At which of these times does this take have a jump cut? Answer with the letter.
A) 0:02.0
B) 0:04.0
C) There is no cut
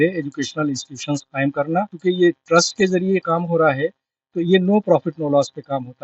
A